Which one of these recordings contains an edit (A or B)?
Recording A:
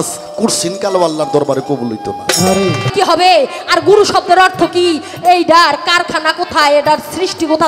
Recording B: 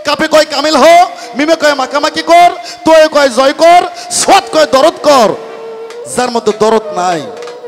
A